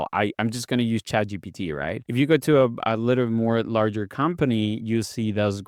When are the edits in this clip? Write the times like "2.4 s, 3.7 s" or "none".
2.0 s